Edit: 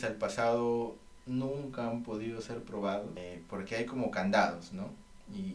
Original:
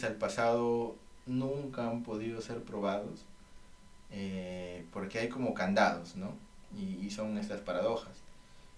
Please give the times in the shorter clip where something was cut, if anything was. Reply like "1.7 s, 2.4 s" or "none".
3.2 s